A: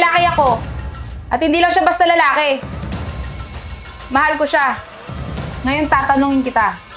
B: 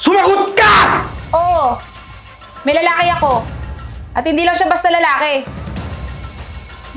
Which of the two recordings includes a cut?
B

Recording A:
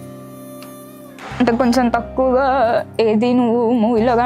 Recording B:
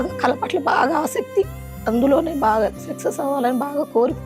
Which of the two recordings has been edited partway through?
A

